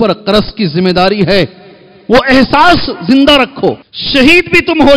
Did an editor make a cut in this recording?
yes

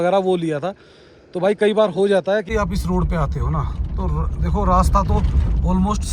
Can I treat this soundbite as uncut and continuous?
no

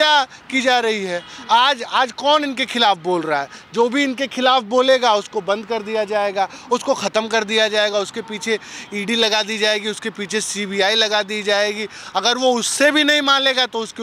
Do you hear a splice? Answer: no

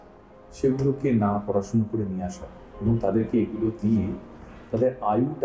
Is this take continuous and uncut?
yes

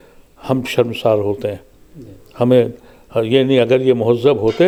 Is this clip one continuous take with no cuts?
yes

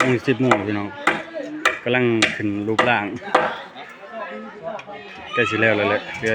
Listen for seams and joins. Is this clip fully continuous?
yes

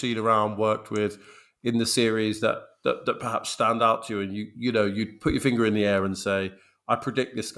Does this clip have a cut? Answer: no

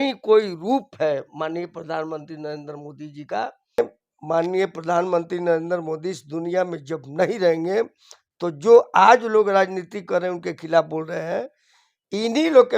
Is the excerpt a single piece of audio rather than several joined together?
no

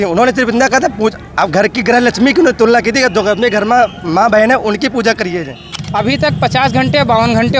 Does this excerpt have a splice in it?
yes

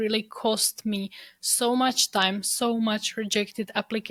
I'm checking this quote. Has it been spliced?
no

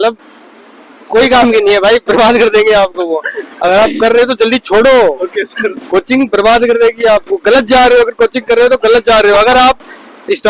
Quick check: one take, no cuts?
yes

